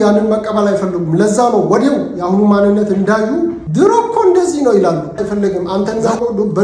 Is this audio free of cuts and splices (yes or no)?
no